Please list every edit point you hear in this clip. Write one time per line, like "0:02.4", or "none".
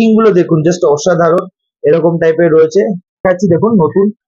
0:03.2